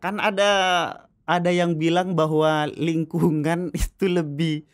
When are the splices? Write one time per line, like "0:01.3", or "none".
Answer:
none